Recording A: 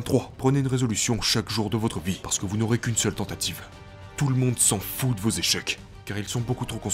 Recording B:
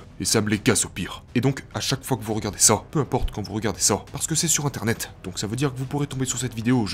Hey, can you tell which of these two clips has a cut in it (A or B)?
A